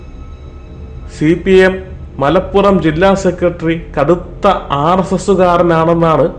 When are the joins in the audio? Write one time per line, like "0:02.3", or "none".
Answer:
none